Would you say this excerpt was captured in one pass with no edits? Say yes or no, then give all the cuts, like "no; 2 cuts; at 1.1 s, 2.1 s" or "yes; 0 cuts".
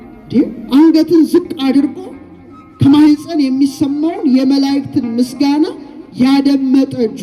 yes; 0 cuts